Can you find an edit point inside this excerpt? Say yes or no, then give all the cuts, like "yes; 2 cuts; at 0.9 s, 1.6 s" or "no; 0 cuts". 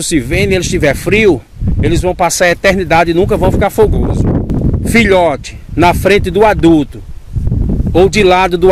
yes; 1 cut; at 4.5 s